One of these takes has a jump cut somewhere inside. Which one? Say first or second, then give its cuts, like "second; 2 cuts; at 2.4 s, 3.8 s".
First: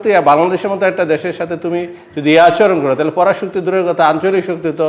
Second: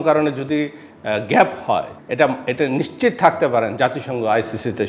second; 1 cut; at 2.0 s